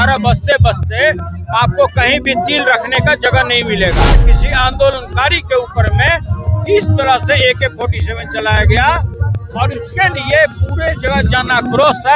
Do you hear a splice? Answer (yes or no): yes